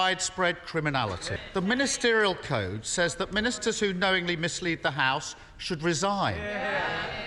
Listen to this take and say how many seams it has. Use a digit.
1